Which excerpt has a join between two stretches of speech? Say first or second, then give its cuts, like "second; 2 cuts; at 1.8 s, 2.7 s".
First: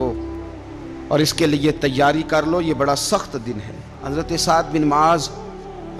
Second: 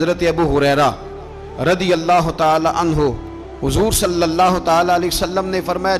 first; 1 cut; at 4.0 s